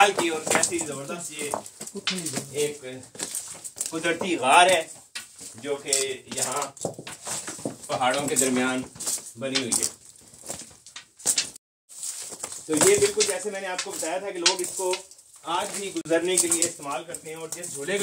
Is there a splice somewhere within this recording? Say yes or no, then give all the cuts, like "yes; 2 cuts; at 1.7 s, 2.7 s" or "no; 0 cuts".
no; 0 cuts